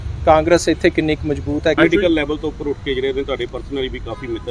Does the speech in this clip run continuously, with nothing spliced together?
no; 1 cut; at 1.8 s

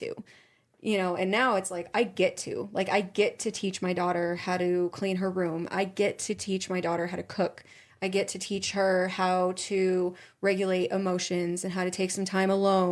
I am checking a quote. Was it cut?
no; 0 cuts

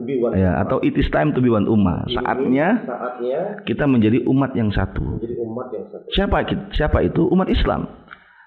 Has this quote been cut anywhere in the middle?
no; 0 cuts

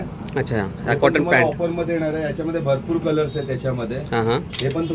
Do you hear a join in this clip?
no; 0 cuts

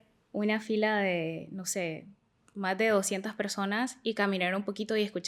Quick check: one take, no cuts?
yes; 0 cuts

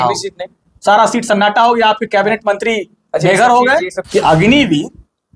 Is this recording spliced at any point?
yes; 1 cut; at 4.0 s

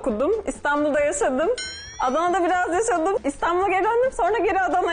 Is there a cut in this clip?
yes; 1 cut; at 3.2 s

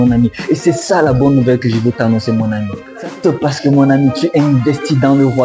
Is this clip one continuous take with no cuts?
no; 1 cut; at 3.0 s

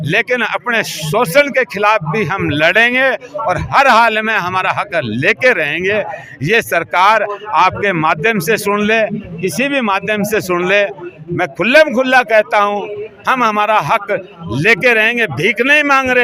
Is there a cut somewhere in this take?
no; 0 cuts

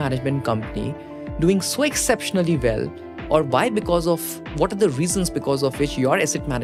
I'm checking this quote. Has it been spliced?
no; 0 cuts

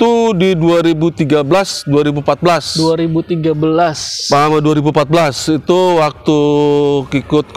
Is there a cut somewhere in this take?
no; 0 cuts

